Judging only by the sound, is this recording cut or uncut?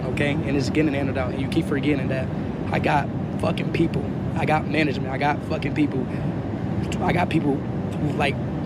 uncut